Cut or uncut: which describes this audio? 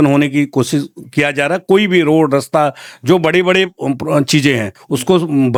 uncut